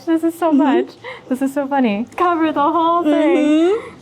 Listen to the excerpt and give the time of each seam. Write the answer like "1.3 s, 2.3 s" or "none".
2.1 s